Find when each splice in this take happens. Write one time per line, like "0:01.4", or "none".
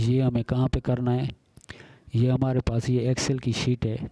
none